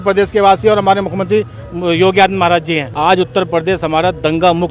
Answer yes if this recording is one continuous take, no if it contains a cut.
no